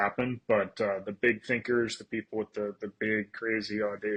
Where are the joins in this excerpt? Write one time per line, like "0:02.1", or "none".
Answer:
none